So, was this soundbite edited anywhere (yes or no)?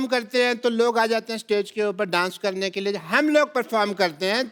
no